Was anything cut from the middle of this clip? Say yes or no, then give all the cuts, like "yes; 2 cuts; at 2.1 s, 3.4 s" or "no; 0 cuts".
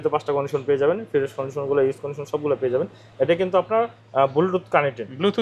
no; 0 cuts